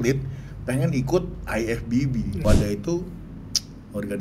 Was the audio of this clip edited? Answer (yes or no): yes